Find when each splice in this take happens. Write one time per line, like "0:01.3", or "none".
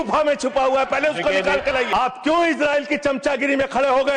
0:01.9